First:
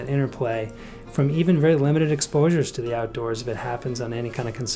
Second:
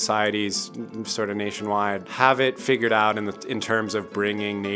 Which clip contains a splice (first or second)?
second